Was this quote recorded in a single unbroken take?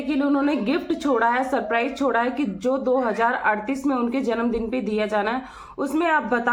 yes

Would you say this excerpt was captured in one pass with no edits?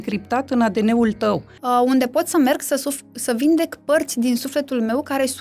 no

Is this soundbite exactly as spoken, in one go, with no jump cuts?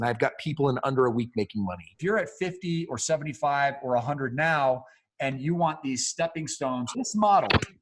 no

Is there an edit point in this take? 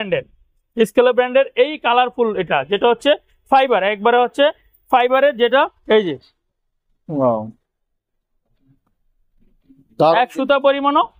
no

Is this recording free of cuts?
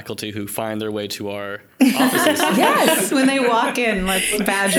yes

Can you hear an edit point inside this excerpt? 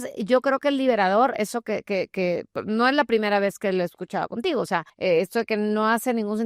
yes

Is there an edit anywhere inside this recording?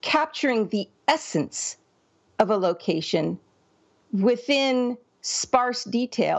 no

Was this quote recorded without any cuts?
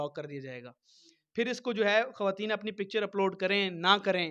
yes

